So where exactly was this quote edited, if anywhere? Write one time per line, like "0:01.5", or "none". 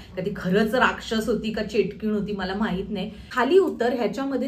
0:03.2